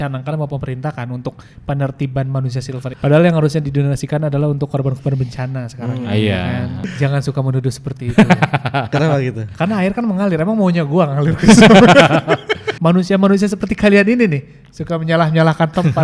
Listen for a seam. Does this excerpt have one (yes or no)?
yes